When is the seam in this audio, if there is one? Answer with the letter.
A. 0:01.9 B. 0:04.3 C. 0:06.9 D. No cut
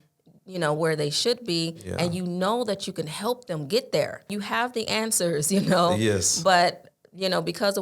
B